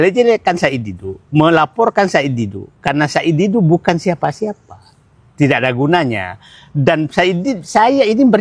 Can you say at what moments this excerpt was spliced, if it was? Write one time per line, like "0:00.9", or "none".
none